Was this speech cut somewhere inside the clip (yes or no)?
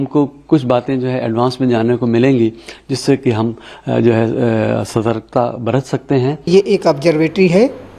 yes